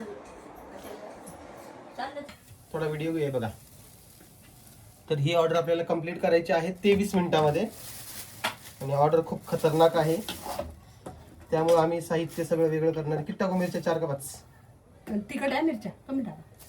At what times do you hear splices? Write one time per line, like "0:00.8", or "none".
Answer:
0:02.3